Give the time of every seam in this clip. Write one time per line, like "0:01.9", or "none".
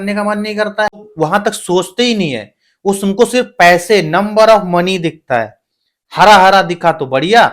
0:01.0